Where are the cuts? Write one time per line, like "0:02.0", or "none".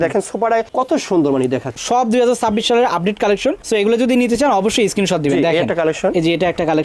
0:01.8